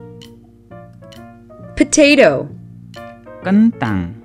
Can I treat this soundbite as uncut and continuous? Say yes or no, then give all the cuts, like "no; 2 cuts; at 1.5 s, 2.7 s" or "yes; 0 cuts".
no; 1 cut; at 1.5 s